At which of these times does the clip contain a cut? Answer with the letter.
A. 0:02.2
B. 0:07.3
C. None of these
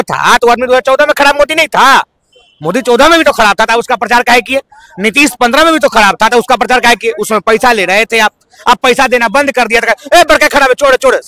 C